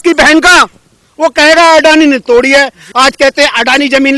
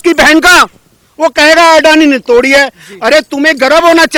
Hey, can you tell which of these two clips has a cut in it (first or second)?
first